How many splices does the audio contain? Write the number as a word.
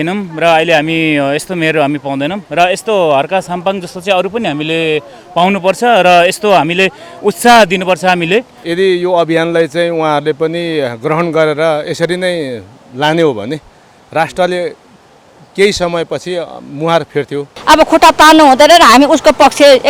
two